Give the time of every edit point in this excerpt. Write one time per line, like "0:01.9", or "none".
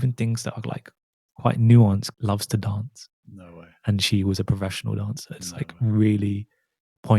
0:02.1